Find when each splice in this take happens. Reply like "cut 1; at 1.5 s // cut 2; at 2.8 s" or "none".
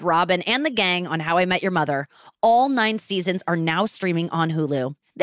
none